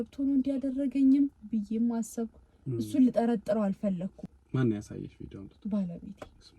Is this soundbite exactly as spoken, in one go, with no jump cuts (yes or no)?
no